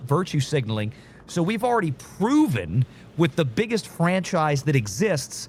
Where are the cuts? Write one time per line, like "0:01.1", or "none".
none